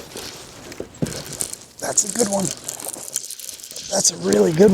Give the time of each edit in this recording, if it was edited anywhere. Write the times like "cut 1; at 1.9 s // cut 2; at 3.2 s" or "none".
none